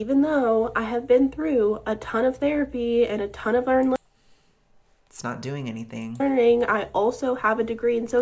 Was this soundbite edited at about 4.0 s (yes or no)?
no